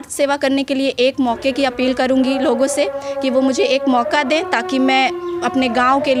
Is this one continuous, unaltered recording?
yes; 0 cuts

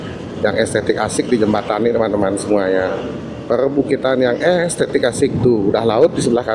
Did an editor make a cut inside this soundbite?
no; 0 cuts

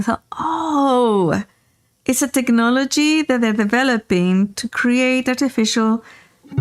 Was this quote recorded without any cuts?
yes; 0 cuts

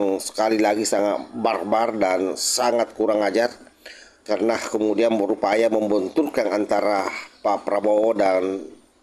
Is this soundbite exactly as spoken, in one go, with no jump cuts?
yes; 0 cuts

